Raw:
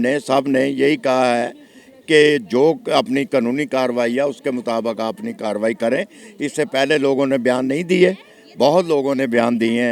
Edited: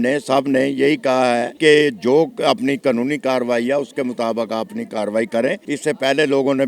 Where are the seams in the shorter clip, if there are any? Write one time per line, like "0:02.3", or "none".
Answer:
0:01.5
0:05.6